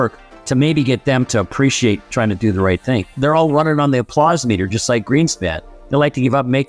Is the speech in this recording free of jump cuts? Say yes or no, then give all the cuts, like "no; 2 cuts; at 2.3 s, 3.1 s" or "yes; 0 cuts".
no; 1 cut; at 3.1 s